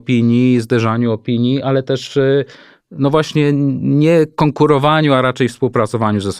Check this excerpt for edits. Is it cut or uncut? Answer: uncut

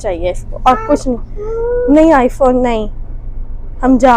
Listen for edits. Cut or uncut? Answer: uncut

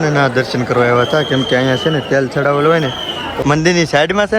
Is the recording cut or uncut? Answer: cut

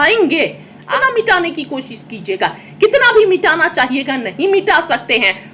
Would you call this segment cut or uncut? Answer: cut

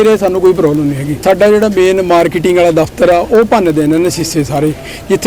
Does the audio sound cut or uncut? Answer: cut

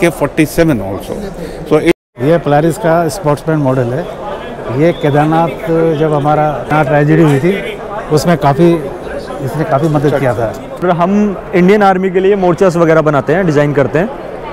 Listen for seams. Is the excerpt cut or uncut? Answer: cut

